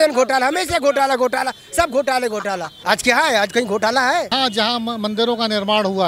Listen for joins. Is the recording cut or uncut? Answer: cut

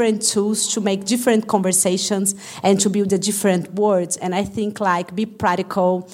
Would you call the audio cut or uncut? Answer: uncut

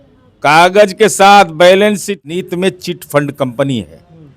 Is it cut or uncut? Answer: cut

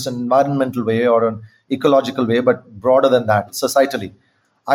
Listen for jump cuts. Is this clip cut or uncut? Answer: cut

